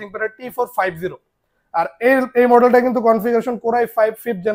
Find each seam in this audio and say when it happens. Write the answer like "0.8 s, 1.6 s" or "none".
none